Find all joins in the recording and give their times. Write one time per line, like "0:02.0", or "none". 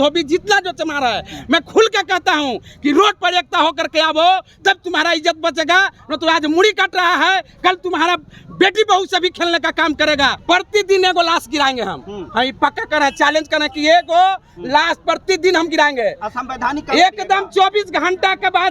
0:10.4